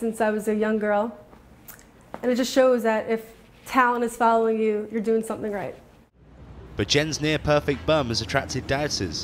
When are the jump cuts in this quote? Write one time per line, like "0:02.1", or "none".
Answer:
0:06.3